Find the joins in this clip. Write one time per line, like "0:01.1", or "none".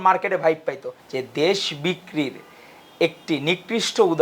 0:00.9